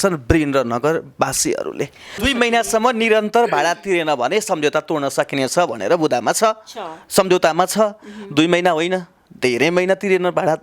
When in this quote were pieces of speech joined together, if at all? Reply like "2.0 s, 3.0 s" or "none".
2.2 s